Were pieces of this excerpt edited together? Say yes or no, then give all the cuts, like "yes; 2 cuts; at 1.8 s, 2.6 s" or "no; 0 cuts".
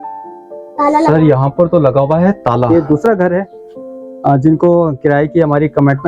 yes; 1 cut; at 2.7 s